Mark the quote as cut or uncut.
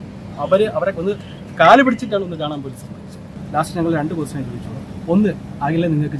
cut